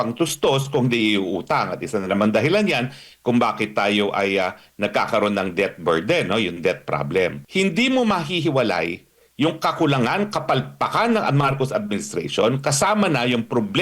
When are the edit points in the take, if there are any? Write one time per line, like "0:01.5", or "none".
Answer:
0:07.4